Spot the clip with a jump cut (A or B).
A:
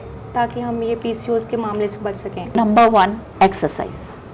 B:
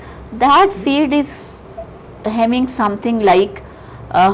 A